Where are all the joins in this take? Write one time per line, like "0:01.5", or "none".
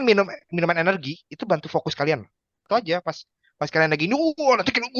0:02.7